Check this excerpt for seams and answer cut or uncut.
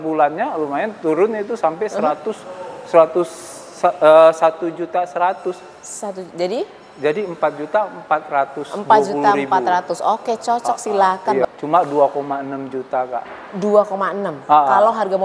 cut